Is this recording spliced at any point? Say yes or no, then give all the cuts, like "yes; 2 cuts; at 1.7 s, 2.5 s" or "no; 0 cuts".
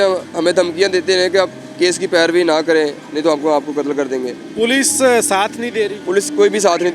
no; 0 cuts